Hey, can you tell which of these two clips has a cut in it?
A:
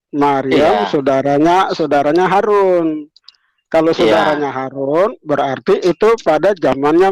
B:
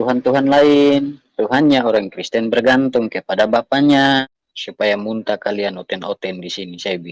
B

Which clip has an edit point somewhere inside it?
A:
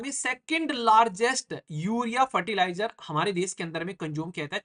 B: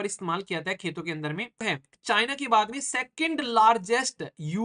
B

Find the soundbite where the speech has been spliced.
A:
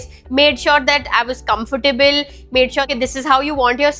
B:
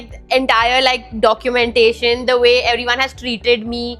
A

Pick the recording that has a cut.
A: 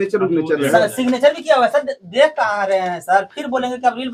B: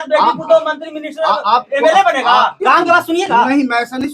B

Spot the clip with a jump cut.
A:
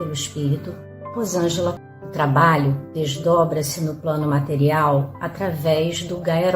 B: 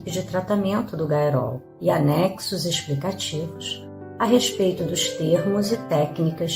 A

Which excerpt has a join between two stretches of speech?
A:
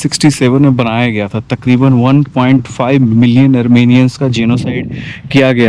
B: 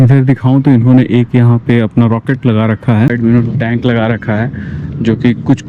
B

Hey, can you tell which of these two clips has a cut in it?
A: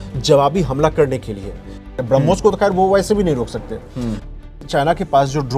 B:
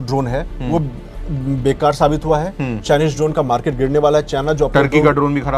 A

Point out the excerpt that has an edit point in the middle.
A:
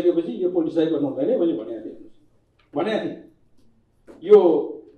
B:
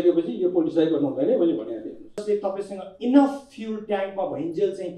B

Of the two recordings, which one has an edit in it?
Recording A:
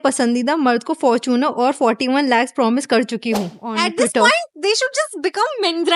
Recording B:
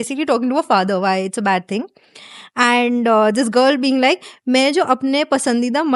A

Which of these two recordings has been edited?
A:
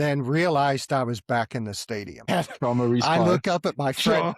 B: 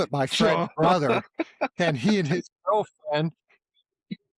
A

